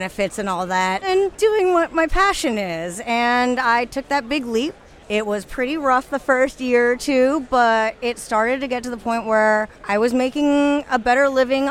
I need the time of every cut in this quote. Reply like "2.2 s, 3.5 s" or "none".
1.0 s, 4.9 s, 9.8 s